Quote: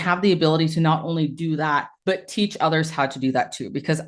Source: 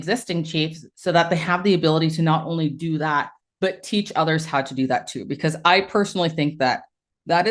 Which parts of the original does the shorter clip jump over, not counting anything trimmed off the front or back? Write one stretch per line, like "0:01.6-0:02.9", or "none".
0:03.3-0:03.5